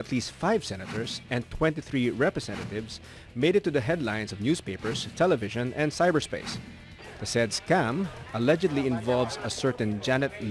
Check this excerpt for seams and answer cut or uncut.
uncut